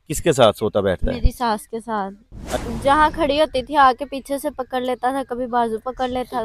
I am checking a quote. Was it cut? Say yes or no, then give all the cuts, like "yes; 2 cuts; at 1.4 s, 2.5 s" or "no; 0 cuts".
yes; 1 cut; at 2.6 s